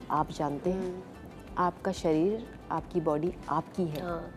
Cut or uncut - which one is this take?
uncut